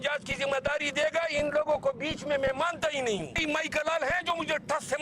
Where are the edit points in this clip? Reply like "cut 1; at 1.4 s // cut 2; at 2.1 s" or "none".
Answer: cut 1; at 3.4 s